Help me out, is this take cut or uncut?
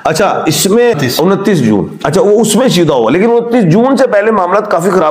cut